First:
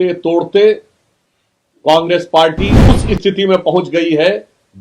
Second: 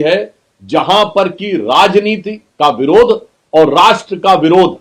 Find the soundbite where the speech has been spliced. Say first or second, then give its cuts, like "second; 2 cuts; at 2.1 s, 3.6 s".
first; 1 cut; at 2.9 s